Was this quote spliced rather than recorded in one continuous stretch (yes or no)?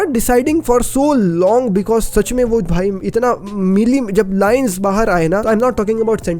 no